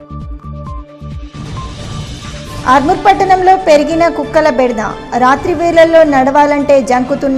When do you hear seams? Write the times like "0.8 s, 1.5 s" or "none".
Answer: 2.5 s